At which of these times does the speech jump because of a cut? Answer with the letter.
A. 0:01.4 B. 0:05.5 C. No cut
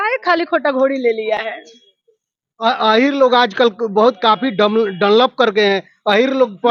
C